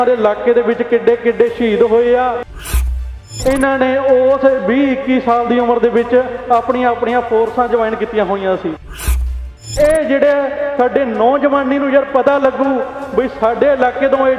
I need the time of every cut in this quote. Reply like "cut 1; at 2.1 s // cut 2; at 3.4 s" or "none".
cut 1; at 2.9 s // cut 2; at 9.3 s

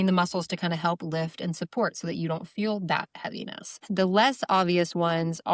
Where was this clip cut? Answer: cut 1; at 3.8 s

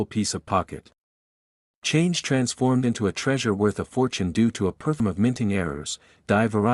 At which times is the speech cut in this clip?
cut 1; at 5.0 s

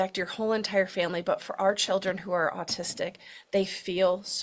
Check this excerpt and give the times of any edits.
none

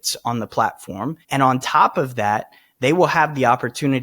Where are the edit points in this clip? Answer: cut 1; at 1.2 s

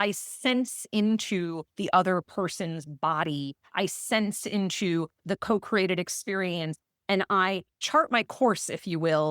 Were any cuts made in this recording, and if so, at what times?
cut 1; at 7.7 s

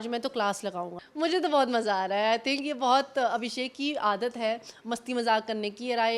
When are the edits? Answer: cut 1; at 0.9 s

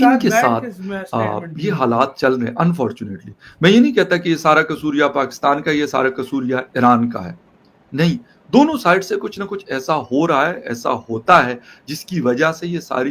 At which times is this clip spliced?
none

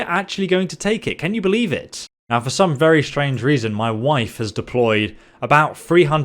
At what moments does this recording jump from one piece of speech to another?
none

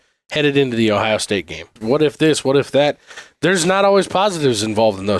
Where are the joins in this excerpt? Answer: cut 1; at 1.7 s

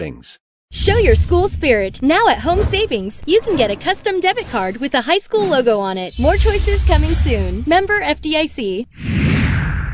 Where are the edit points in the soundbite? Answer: cut 1; at 9.0 s

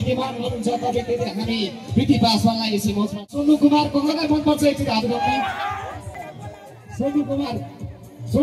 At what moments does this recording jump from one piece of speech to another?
cut 1; at 3.3 s // cut 2; at 6.2 s

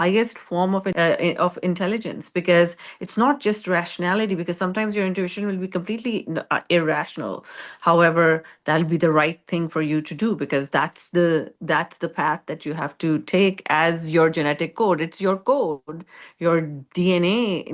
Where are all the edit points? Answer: none

